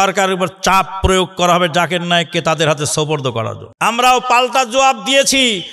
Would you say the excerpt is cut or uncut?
cut